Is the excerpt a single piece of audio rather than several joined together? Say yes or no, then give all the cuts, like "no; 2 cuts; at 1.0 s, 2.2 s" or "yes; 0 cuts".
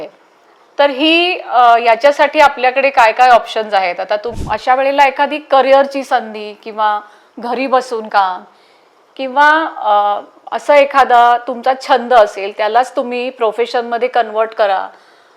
no; 1 cut; at 4.3 s